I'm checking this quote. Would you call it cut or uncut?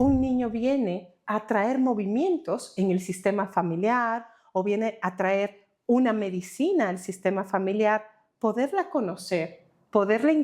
uncut